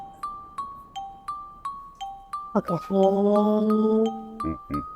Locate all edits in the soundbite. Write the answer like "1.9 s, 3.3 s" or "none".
2.5 s, 4.1 s